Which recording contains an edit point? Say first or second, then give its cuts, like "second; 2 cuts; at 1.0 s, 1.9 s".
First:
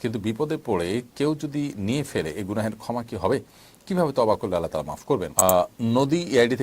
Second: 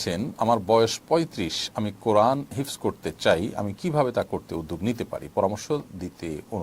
first; 1 cut; at 5.3 s